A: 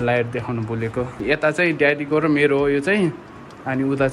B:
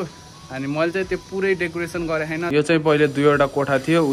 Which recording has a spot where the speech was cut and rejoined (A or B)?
A